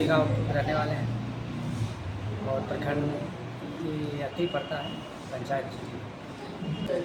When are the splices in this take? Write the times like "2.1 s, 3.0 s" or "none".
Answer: none